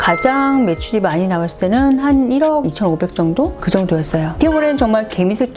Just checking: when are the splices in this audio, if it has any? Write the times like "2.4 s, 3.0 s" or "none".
4.3 s